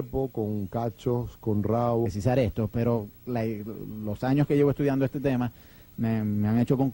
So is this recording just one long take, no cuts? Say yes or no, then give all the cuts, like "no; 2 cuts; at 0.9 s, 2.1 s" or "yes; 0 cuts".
yes; 0 cuts